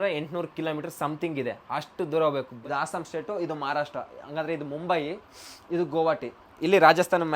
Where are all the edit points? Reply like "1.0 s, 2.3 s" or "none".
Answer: 2.5 s